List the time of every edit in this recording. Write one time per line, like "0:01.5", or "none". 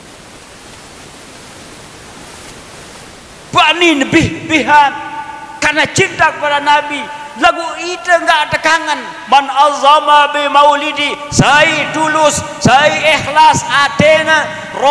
0:03.4